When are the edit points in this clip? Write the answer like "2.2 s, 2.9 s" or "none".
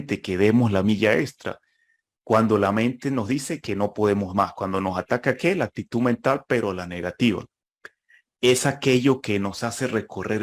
none